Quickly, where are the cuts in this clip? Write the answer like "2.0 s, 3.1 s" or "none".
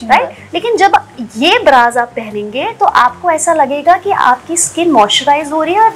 none